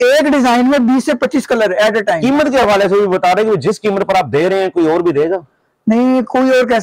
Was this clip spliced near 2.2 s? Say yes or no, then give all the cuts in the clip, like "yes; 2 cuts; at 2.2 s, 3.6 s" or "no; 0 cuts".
yes; 1 cut; at 2.2 s